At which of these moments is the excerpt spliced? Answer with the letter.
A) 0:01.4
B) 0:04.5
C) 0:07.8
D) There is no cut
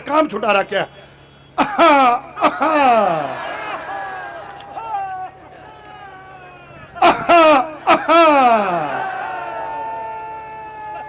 D